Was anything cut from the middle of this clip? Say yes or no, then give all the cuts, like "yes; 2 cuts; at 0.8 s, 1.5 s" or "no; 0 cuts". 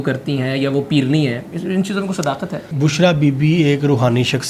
yes; 1 cut; at 2.7 s